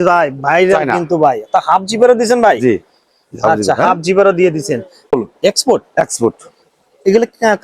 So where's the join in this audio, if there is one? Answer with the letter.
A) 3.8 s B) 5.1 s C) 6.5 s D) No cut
B